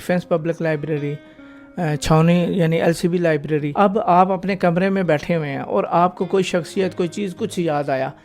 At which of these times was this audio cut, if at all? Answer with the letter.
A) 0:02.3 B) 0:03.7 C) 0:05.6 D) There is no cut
B